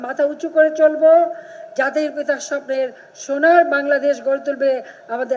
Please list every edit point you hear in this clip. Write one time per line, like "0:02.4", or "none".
none